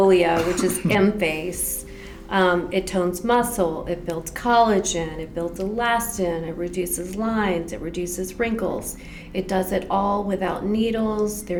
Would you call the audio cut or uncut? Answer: uncut